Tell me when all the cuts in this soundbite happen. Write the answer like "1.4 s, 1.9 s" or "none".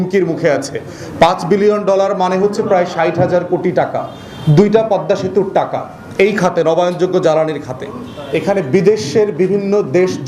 8.1 s